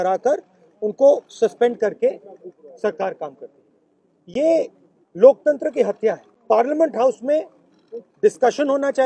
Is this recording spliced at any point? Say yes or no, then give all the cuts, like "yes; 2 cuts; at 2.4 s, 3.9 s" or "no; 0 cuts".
yes; 1 cut; at 6.3 s